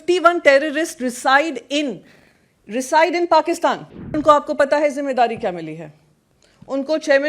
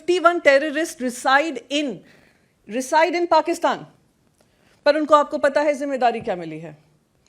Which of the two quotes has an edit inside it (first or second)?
first